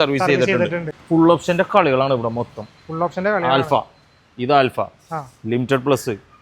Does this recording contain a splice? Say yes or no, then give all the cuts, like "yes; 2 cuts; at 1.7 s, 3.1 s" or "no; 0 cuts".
yes; 1 cut; at 0.9 s